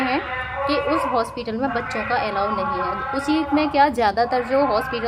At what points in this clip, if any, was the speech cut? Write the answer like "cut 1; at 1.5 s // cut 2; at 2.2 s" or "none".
none